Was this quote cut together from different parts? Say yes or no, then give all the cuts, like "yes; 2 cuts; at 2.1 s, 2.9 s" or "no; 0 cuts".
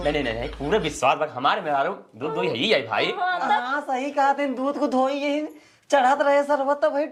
no; 0 cuts